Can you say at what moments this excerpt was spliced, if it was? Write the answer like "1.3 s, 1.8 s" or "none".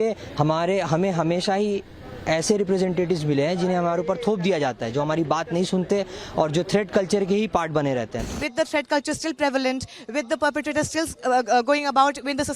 8.3 s